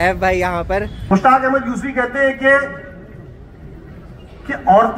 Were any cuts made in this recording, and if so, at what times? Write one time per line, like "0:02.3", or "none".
0:01.0